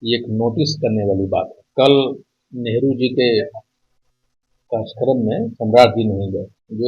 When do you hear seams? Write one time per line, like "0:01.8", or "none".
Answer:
0:01.6
0:03.4